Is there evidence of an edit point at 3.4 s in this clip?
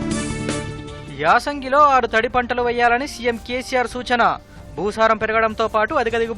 no; 1 cut; at 0.9 s

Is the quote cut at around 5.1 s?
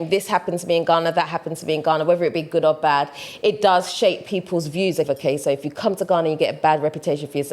yes; 1 cut; at 5.1 s

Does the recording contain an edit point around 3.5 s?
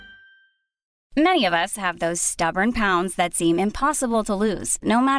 no; 1 cut; at 0.9 s

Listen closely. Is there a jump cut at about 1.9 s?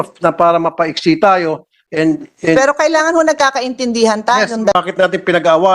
no; 1 cut; at 4.7 s

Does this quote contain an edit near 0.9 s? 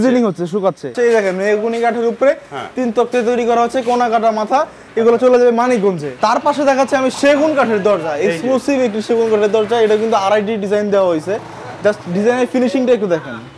yes; 2 cuts; at 0.9 s, 6.2 s

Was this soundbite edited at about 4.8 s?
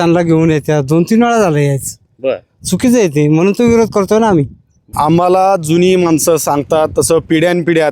yes; 1 cut; at 4.8 s

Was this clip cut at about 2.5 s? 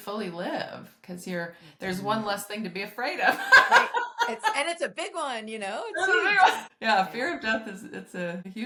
no; 0 cuts

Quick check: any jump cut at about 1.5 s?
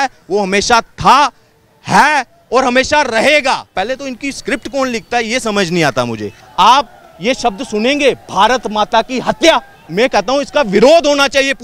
no; 3 cuts; at 3.7 s, 6.4 s, 9.8 s

